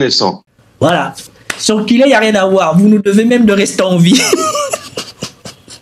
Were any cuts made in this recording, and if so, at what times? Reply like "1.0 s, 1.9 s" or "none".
0.9 s